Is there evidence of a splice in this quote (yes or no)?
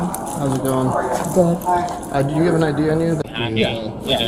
yes